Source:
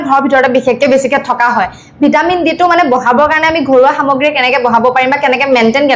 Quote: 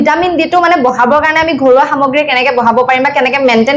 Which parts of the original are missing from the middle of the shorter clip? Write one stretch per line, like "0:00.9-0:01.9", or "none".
none